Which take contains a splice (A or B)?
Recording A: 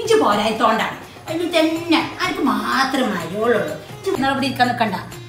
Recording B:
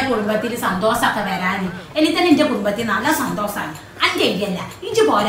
A